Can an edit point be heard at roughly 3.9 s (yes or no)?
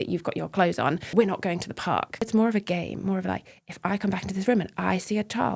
no